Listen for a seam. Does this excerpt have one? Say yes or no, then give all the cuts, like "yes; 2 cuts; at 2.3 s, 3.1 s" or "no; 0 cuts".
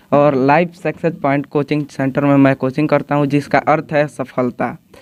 no; 0 cuts